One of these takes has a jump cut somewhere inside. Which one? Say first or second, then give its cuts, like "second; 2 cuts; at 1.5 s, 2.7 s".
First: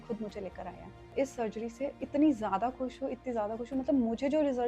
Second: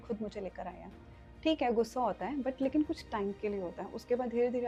first; 1 cut; at 1.1 s